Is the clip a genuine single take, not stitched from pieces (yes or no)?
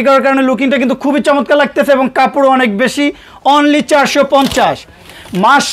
yes